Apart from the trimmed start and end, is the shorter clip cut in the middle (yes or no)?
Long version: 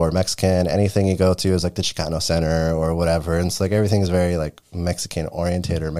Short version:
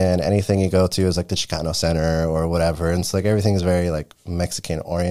no